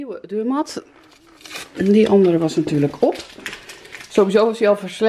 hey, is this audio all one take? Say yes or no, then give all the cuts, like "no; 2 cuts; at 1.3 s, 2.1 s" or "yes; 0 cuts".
yes; 0 cuts